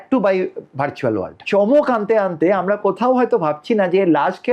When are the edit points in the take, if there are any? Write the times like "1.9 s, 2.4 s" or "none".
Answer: 1.4 s